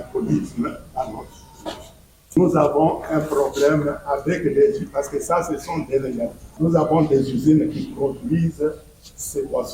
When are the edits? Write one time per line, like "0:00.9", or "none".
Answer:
0:02.4
0:06.4